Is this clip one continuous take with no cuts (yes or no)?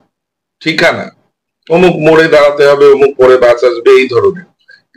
yes